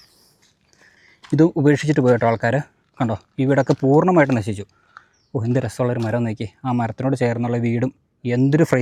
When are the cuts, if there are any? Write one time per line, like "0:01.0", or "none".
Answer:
none